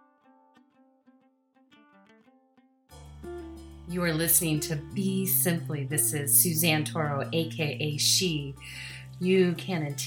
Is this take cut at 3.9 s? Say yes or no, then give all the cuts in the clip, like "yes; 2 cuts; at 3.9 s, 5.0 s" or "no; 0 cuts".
yes; 1 cut; at 3.9 s